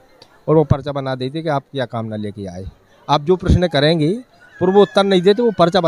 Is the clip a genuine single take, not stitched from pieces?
yes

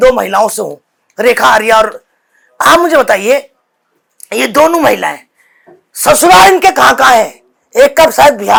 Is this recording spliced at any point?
no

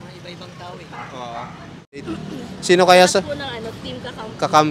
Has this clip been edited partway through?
yes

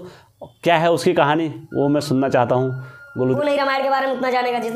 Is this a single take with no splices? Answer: no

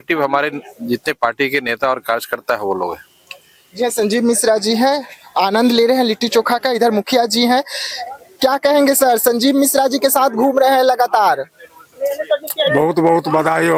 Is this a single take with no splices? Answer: yes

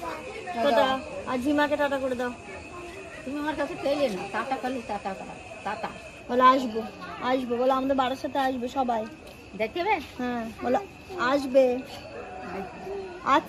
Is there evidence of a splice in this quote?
no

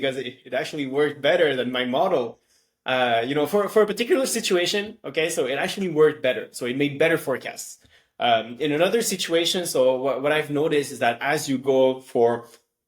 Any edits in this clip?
no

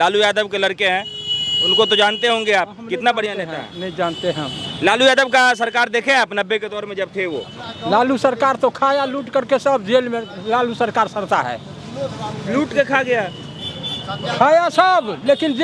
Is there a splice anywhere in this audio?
no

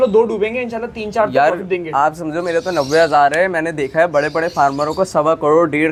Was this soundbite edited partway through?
no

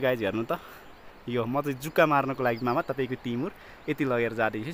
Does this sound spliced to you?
no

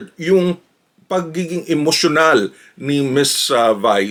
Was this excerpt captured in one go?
yes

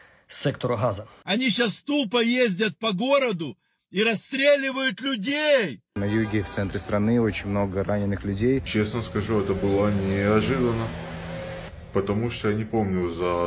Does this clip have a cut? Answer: yes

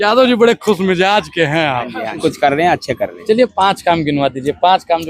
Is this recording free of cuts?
no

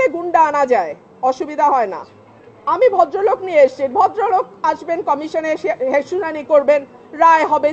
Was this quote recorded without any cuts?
yes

